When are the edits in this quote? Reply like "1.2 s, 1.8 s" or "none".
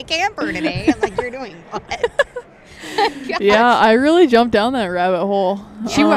none